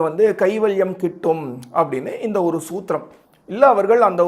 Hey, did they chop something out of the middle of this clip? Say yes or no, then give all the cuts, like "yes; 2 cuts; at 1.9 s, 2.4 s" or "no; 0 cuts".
no; 0 cuts